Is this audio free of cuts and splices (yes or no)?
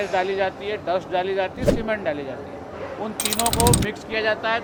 yes